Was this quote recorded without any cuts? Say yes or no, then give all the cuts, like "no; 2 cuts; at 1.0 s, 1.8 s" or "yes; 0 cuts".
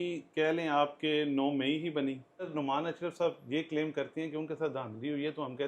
no; 1 cut; at 2.5 s